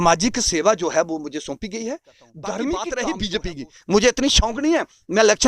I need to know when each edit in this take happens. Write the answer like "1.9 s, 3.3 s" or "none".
3.2 s